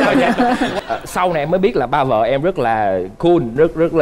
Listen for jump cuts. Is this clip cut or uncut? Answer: uncut